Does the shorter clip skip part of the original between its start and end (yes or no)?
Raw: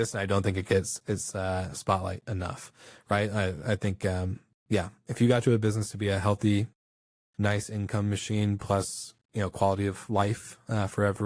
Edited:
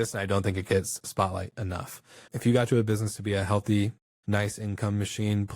yes